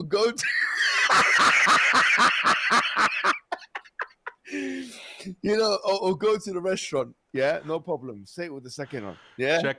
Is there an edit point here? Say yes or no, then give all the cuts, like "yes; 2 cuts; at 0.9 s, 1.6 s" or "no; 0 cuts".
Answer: yes; 1 cut; at 7.2 s